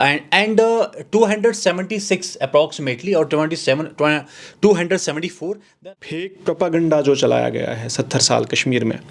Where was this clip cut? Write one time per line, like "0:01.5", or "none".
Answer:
0:05.8